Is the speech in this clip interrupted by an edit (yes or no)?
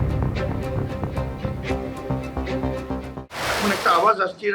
yes